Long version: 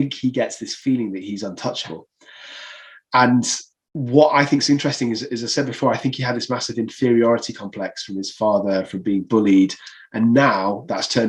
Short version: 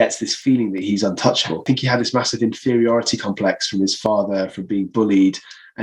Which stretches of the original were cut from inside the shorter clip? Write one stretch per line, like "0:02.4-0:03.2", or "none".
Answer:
0:02.0-0:06.0